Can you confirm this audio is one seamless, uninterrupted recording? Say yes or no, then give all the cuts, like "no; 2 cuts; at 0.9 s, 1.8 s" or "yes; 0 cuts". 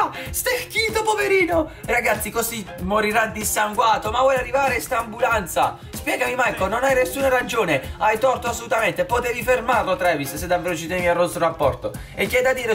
yes; 0 cuts